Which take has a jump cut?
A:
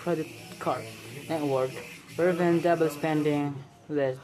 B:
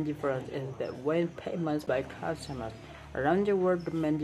B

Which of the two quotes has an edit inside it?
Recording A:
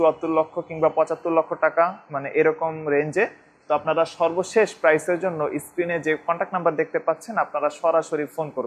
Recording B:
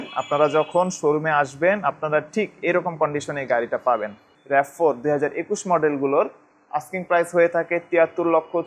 B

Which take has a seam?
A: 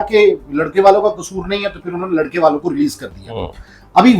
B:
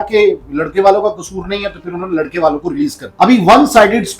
B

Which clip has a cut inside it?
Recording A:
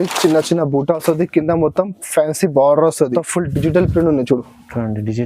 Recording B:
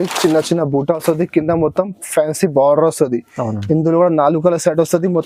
A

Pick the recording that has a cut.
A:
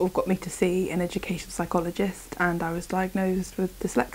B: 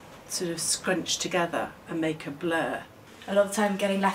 B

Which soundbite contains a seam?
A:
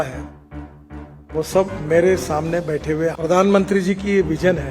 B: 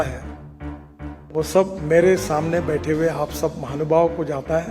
A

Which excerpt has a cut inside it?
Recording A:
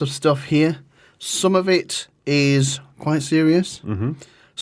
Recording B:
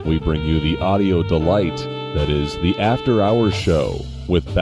A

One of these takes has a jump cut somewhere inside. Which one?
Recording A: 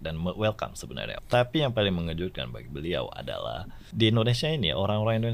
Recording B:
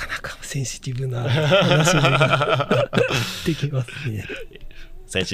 A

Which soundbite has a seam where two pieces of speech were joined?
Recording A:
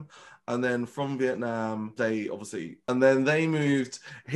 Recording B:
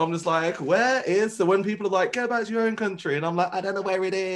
A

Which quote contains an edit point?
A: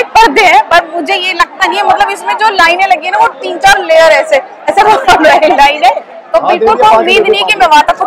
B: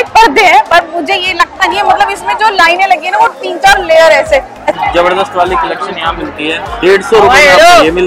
B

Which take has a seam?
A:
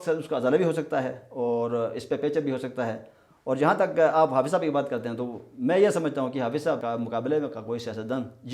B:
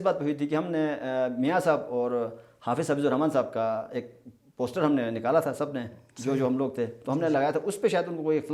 A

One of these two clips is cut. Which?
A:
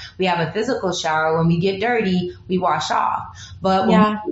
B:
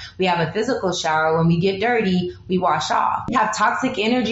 B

